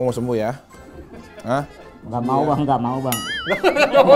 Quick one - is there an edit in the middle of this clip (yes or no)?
yes